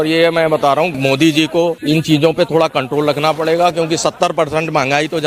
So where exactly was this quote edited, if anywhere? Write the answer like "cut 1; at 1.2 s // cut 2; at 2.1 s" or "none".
cut 1; at 0.9 s // cut 2; at 1.8 s